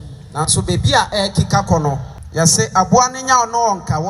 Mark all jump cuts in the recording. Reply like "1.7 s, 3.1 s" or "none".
2.1 s